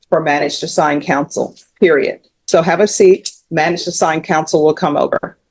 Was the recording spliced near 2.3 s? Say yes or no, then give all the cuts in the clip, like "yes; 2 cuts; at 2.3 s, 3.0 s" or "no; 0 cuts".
yes; 1 cut; at 2.3 s